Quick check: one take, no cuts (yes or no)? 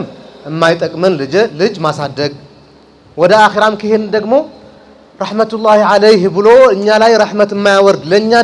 yes